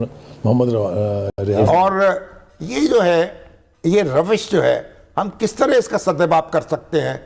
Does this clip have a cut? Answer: yes; 1 cut; at 1.5 s

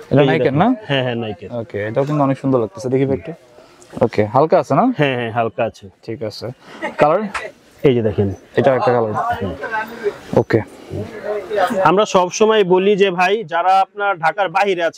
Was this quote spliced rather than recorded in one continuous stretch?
no; 0 cuts

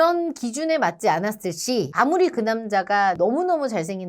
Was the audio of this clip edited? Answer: no; 0 cuts

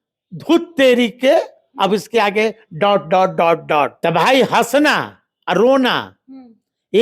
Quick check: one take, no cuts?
no; 1 cut; at 3.9 s

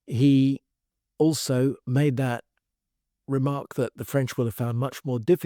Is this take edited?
yes; 1 cut; at 1.8 s

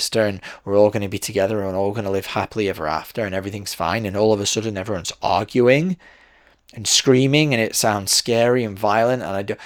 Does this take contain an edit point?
no; 0 cuts

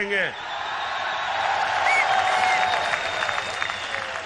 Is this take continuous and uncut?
yes; 0 cuts

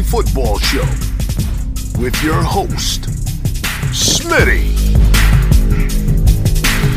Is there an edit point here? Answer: no; 0 cuts

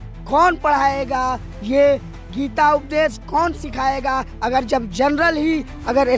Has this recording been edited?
no; 0 cuts

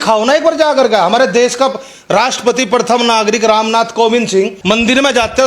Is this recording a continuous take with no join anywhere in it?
no; 1 cut; at 4.6 s

